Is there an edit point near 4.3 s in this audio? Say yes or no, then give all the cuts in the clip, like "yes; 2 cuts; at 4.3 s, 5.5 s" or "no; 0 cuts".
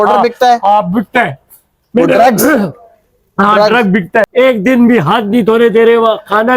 yes; 1 cut; at 4.3 s